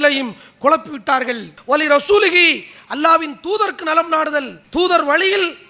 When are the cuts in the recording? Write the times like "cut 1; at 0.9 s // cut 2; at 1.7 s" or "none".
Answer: cut 1; at 1.5 s // cut 2; at 4.6 s